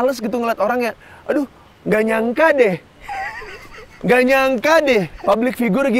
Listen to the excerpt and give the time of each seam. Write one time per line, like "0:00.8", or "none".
0:03.0
0:05.1